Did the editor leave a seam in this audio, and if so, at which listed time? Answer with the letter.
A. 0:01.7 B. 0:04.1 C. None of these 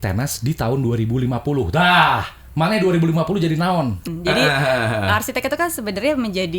B